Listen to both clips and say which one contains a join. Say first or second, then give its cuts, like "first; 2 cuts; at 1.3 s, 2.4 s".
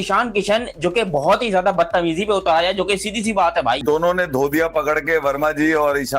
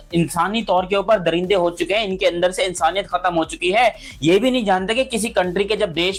first; 1 cut; at 3.8 s